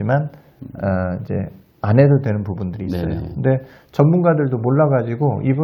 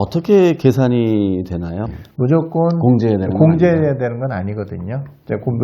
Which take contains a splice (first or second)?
second